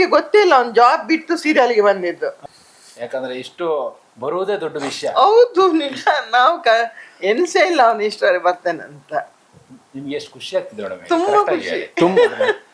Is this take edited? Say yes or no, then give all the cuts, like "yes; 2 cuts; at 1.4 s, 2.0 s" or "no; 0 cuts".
yes; 1 cut; at 2.3 s